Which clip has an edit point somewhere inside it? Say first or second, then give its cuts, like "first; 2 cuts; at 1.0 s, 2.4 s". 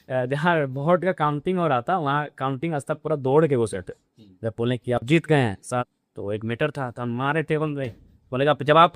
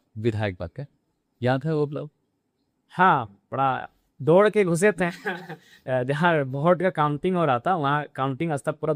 first; 1 cut; at 5.6 s